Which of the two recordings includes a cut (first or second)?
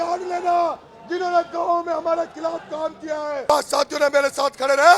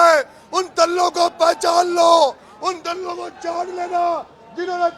first